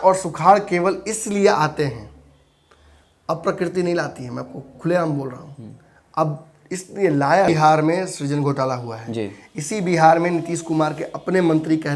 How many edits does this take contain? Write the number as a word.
one